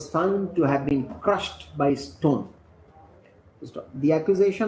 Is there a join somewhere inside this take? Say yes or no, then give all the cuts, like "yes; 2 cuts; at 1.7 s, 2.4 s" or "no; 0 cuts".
no; 0 cuts